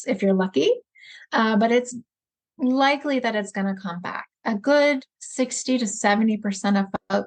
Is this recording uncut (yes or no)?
no